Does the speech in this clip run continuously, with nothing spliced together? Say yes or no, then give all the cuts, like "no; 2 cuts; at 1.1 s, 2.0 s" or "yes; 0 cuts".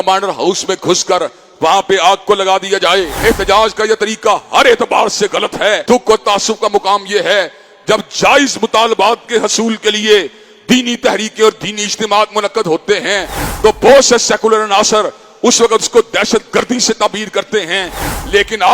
no; 2 cuts; at 3.1 s, 5.8 s